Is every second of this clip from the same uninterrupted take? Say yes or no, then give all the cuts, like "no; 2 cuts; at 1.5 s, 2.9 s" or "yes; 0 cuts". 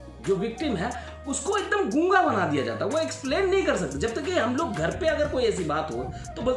yes; 0 cuts